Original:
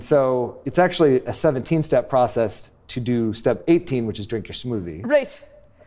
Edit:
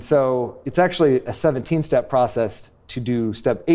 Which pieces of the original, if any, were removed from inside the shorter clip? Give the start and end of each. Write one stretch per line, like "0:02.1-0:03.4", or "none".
none